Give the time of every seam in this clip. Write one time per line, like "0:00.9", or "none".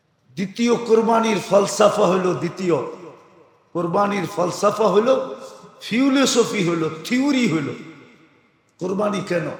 none